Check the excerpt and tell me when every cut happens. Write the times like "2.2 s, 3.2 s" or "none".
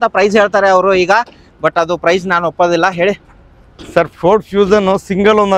none